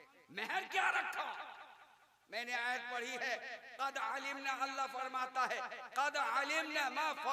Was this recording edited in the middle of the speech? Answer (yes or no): no